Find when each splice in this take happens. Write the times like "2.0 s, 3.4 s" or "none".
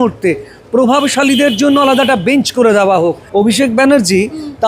3.2 s